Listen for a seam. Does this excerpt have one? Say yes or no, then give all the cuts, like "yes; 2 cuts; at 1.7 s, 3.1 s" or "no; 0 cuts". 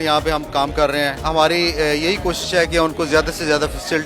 yes; 1 cut; at 1.2 s